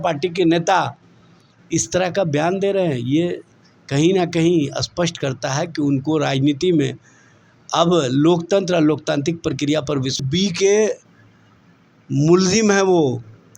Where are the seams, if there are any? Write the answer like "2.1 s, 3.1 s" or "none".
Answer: 10.2 s